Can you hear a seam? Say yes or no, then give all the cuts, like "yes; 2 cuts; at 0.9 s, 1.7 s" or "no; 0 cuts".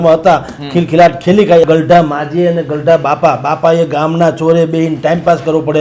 yes; 1 cut; at 1.6 s